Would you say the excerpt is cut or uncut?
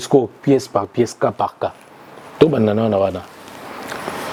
uncut